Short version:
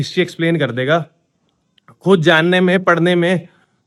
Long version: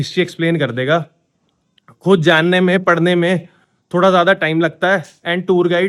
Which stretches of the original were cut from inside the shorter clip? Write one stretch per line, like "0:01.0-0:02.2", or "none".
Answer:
none

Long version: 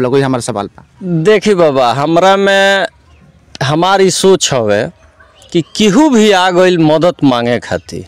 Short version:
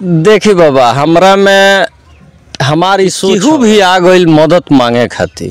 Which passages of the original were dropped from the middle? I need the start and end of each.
0:04.3-0:05.8

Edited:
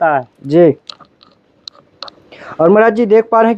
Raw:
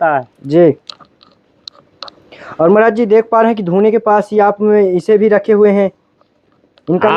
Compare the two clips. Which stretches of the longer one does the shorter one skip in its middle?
none

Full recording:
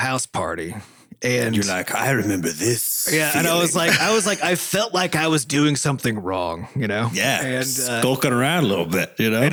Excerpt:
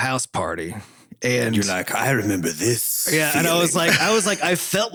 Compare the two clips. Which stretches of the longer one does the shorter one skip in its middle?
none

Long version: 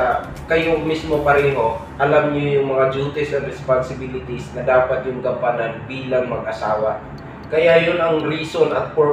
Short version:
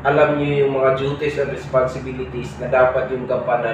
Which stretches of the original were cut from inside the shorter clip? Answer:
none

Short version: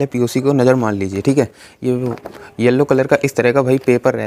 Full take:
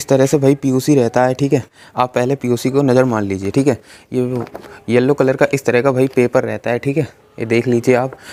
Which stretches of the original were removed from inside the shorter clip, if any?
none

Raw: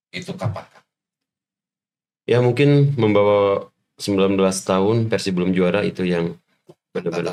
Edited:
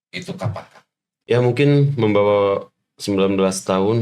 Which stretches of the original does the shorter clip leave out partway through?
0:01.3-0:02.3

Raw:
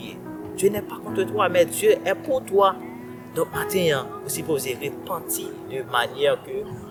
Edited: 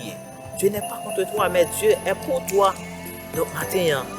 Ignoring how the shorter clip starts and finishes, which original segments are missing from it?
none

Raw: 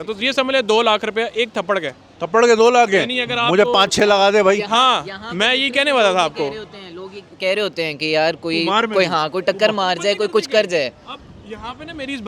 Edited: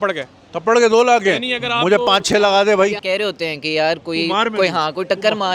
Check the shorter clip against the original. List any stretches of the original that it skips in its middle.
0:04.6-0:07.3

